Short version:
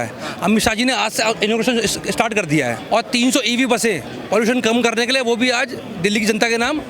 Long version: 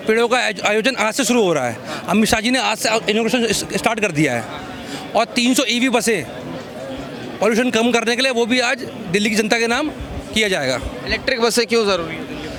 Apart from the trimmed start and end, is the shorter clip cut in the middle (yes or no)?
yes